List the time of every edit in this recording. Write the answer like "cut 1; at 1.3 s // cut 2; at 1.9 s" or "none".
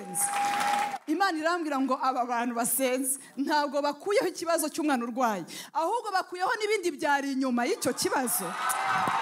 none